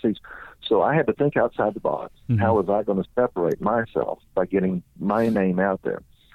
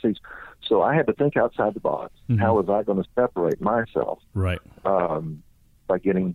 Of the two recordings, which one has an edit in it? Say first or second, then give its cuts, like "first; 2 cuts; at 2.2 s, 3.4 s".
first; 1 cut; at 4.2 s